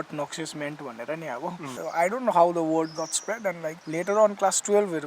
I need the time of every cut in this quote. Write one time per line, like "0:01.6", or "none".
0:01.8
0:03.8